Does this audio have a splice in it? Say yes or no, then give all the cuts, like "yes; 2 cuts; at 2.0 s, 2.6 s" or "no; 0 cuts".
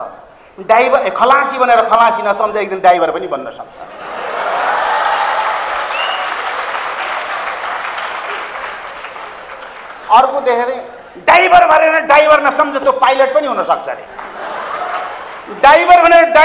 no; 0 cuts